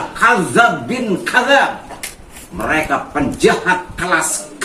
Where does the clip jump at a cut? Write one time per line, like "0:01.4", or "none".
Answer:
none